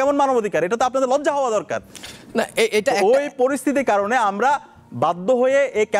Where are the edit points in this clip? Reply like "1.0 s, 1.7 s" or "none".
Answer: none